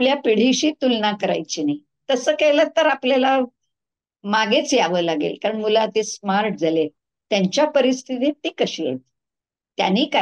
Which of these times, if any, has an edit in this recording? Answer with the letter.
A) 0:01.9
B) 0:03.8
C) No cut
C